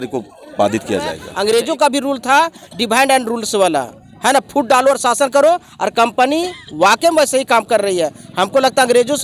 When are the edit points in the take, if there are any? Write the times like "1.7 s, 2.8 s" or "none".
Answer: 1.3 s